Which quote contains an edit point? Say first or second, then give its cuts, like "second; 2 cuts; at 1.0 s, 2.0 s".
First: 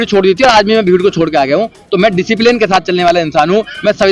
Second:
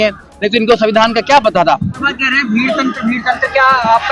second; 1 cut; at 2.0 s